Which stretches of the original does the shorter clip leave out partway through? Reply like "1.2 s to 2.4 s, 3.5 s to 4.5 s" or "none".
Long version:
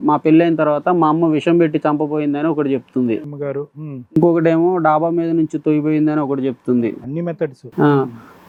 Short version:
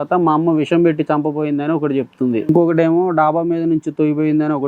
3.2 s to 4.1 s

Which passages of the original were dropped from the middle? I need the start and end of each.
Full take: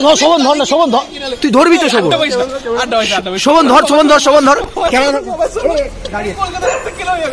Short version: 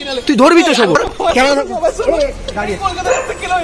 2.1 s to 4.5 s

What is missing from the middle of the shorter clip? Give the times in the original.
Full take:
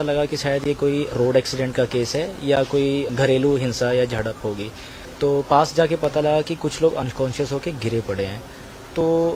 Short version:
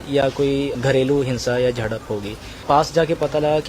5.0 s to 5.5 s

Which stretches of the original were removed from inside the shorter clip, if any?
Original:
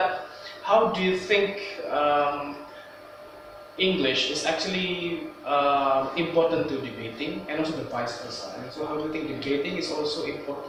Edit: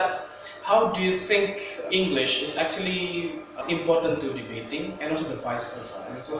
1.7 s to 3.6 s, 5.5 s to 6.1 s

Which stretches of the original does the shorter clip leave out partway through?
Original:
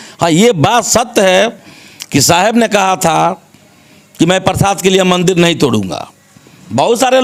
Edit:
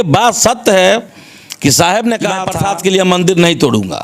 3.0 s to 4.5 s

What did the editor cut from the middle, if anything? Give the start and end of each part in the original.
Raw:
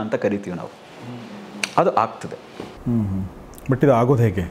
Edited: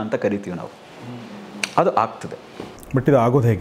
2.7 s to 3.4 s

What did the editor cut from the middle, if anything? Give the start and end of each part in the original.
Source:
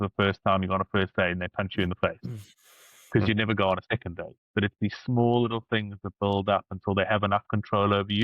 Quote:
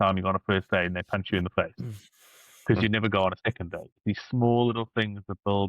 4.4 s to 4.7 s

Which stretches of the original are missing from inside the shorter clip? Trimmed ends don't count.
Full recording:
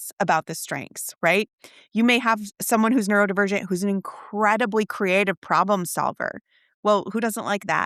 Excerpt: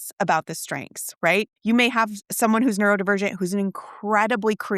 1.5 s to 1.8 s

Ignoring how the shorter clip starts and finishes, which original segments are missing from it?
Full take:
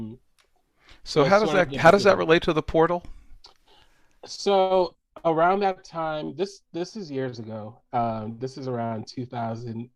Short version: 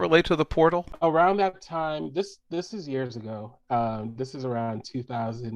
3.1 s to 5.1 s

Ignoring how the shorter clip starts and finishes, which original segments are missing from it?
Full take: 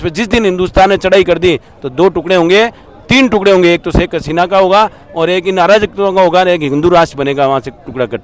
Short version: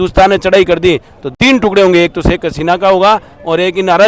1.8 s to 2.9 s

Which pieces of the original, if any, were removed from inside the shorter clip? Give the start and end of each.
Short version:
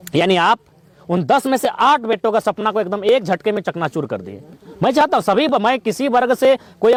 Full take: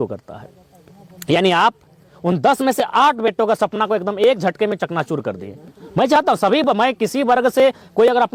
none

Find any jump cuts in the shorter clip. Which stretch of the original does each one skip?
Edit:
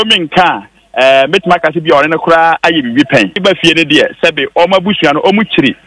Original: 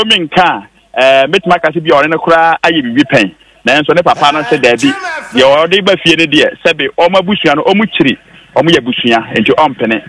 3.4 s to 5.8 s

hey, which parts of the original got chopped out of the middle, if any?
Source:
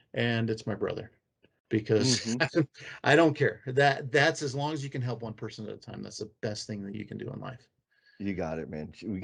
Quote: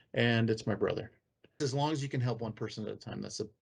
1.6 s to 4.4 s

